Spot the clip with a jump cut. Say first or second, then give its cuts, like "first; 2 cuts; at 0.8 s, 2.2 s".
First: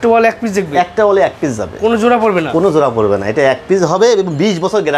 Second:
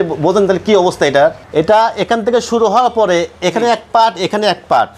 second; 1 cut; at 1.4 s